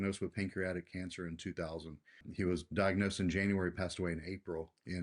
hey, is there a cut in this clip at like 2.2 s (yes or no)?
yes